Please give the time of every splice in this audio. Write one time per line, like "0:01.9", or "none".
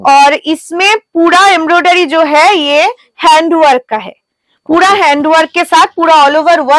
none